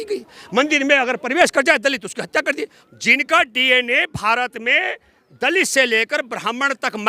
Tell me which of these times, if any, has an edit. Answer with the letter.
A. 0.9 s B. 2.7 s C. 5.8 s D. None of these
B